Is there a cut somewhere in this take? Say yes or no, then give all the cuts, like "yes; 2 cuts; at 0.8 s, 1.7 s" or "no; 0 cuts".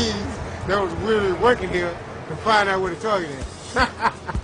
yes; 1 cut; at 2.8 s